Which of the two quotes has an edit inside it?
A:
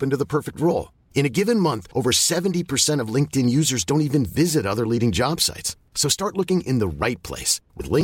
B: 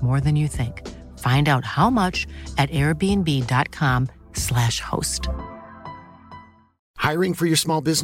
B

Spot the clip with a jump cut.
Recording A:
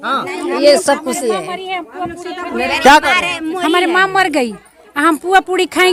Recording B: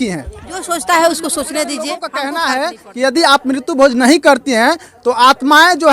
B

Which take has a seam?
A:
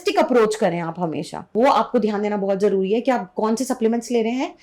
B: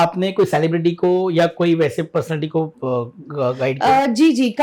A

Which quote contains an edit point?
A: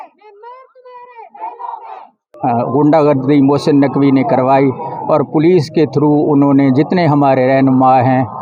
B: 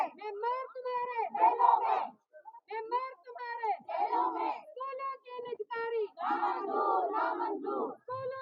A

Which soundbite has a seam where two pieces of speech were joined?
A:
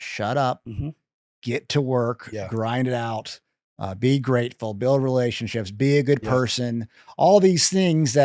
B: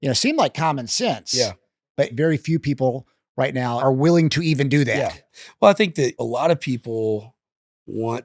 B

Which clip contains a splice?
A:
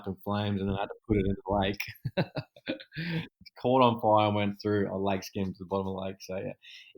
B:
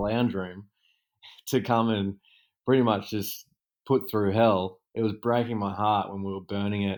A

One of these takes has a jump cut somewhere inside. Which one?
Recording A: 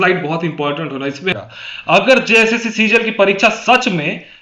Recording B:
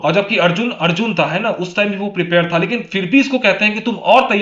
A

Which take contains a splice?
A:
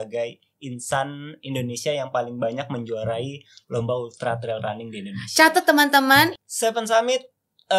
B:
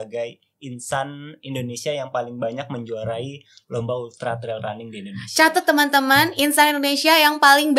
A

